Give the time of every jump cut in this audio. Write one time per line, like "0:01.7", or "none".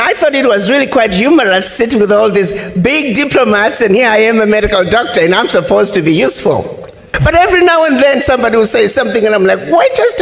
0:07.1